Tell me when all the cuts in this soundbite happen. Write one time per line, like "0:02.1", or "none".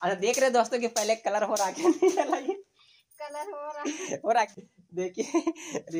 0:04.5